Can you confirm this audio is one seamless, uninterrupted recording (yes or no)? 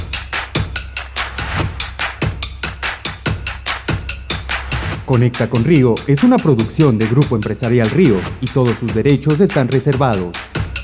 yes